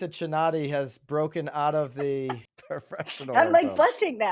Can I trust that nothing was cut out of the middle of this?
no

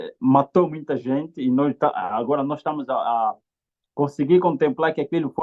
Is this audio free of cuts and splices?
yes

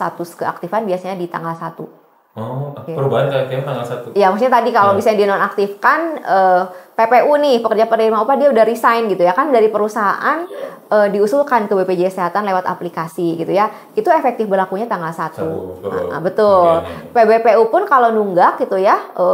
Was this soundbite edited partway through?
no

